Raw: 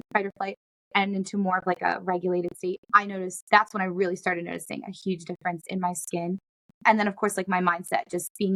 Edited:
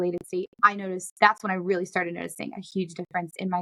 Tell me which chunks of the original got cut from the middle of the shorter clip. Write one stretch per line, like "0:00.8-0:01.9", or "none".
none